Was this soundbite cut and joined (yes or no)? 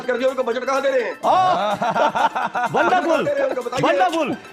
no